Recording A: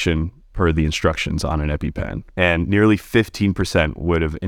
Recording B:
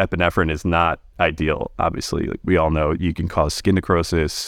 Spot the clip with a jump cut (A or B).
A